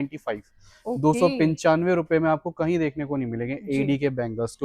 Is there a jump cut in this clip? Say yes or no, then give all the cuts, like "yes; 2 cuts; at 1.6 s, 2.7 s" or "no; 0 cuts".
no; 0 cuts